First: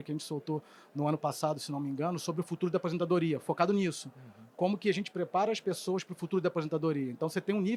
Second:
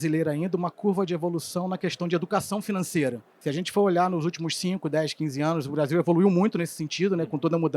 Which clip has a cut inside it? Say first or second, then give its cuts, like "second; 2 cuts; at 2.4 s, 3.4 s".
second; 1 cut; at 3.3 s